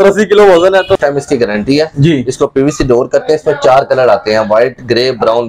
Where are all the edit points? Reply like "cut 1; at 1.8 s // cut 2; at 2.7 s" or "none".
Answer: cut 1; at 1.0 s